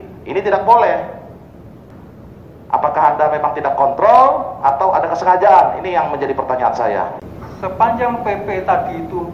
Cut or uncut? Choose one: uncut